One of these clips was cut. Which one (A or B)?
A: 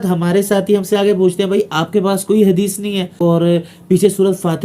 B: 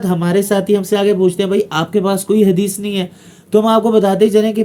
A